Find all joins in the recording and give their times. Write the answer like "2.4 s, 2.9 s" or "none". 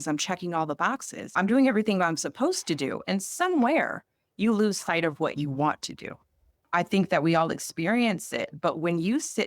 1.4 s